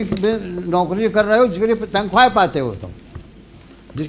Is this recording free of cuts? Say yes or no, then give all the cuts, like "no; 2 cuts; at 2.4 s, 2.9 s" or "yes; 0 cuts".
yes; 0 cuts